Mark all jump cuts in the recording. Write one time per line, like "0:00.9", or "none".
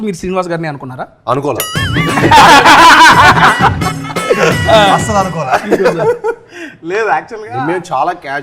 none